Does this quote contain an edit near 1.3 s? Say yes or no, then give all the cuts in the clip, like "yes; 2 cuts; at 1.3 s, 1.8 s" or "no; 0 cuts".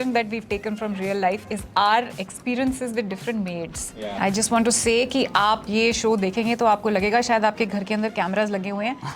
no; 1 cut; at 4.1 s